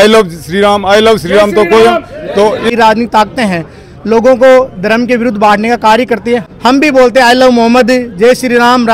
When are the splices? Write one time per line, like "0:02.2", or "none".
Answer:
0:02.7
0:06.5